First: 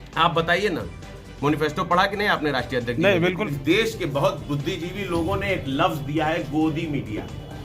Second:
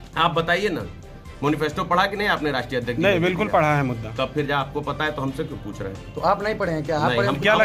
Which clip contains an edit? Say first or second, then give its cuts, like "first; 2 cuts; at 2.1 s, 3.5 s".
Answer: first; 1 cut; at 3.4 s